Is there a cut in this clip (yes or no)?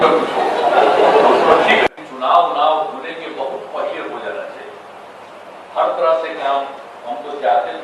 yes